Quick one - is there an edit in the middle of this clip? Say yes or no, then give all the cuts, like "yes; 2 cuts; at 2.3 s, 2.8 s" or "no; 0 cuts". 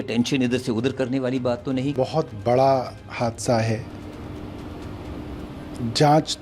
no; 0 cuts